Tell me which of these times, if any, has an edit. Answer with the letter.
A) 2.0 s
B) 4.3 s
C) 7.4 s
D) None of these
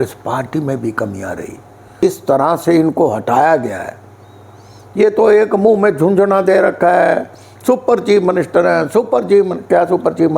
A